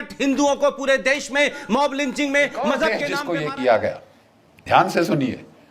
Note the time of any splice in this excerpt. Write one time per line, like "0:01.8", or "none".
0:03.1